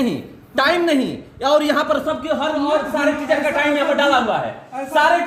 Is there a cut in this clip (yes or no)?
no